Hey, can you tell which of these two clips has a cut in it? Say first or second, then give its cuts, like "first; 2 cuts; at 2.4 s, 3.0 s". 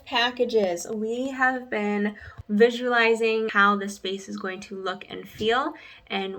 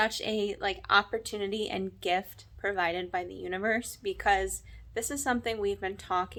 first; 2 cuts; at 2.3 s, 3.5 s